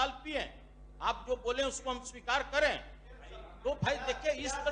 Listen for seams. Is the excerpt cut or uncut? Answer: uncut